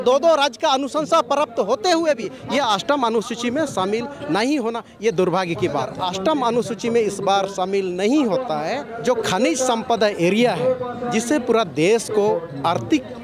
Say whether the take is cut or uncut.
cut